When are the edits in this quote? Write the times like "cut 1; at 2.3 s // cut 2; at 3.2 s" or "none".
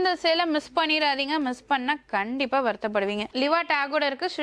cut 1; at 3.3 s